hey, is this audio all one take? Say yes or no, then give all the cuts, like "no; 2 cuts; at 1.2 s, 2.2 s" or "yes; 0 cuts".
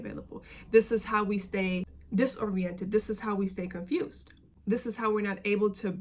no; 1 cut; at 1.9 s